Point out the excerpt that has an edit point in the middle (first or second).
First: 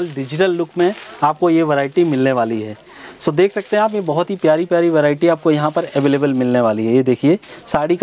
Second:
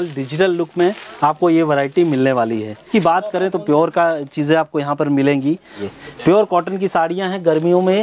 second